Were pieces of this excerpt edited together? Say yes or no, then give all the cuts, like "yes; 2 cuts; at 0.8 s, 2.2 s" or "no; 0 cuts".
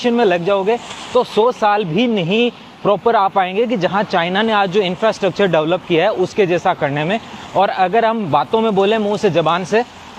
no; 0 cuts